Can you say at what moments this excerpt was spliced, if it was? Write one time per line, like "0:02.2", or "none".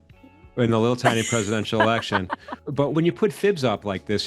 0:02.9